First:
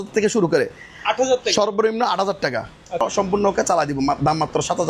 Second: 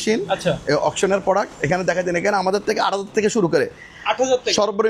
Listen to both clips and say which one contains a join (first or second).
first